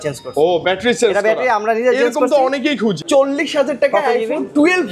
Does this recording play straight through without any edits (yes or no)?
no